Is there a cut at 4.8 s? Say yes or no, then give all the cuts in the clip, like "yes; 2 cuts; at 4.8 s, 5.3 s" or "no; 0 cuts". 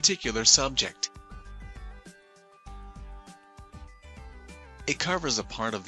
yes; 2 cuts; at 1.0 s, 4.8 s